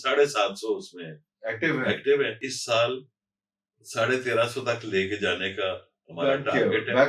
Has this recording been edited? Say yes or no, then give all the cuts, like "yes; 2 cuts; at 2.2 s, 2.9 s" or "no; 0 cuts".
yes; 1 cut; at 2.5 s